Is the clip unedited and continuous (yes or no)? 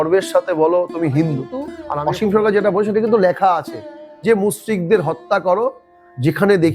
no